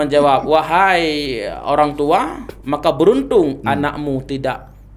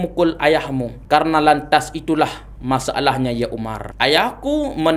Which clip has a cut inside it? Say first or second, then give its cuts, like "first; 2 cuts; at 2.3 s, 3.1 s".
second; 2 cuts; at 0.9 s, 3.8 s